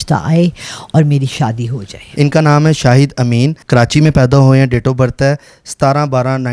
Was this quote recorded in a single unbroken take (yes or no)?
no